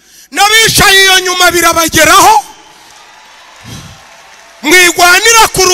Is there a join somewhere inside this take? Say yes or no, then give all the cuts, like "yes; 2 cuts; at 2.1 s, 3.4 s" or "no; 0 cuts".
no; 0 cuts